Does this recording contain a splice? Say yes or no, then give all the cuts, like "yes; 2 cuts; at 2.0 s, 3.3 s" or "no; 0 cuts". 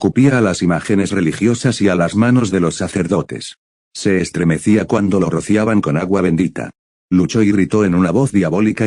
no; 0 cuts